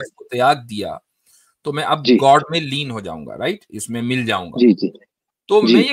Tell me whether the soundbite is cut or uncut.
uncut